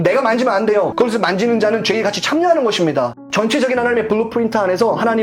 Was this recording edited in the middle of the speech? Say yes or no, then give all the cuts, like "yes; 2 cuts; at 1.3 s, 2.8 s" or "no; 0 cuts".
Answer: yes; 2 cuts; at 0.9 s, 3.2 s